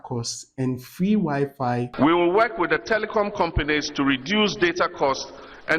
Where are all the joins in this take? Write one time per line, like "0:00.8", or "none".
0:01.9